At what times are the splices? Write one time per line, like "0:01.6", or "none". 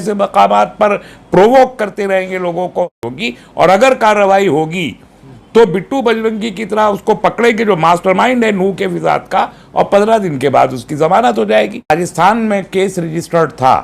0:03.0
0:11.9